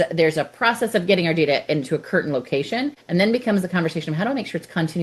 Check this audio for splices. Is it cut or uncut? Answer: cut